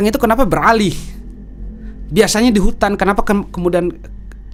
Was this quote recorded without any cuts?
yes; 0 cuts

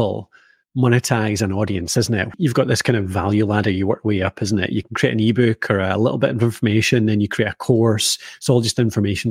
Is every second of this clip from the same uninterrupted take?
no; 2 cuts; at 2.3 s, 4.8 s

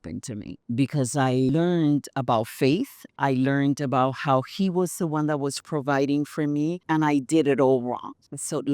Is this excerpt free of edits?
no; 1 cut; at 3.0 s

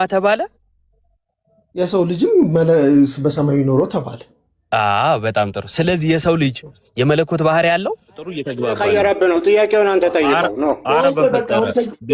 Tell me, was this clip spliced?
yes; 1 cut; at 8.5 s

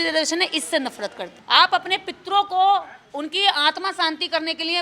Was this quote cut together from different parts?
yes; 1 cut; at 1.3 s

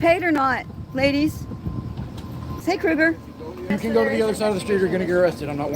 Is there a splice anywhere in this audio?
yes; 2 cuts; at 2.6 s, 3.7 s

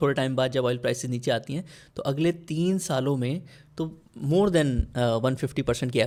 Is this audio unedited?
yes; 0 cuts

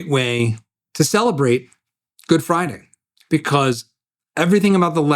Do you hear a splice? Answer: no; 0 cuts

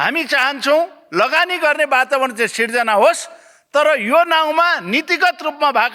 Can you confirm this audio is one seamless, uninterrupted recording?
yes; 0 cuts

